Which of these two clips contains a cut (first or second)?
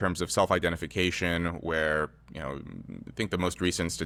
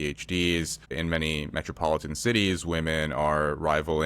second